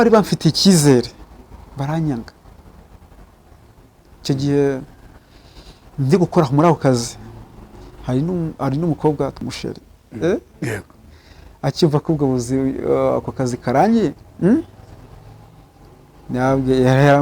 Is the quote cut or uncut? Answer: cut